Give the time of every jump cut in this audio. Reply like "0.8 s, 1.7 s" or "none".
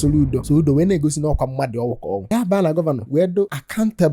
2.3 s